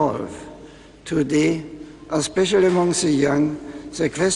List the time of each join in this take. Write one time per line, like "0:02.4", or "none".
0:02.8

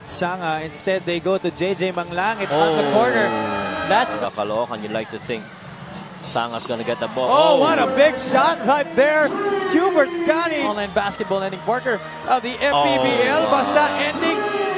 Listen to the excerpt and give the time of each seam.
0:04.1
0:10.6

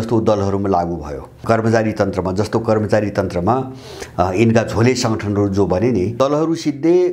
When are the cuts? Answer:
0:01.4
0:06.1

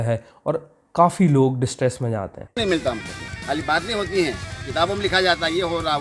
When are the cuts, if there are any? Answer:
0:02.4

